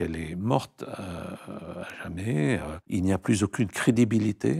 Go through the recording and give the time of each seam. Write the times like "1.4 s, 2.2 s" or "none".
2.8 s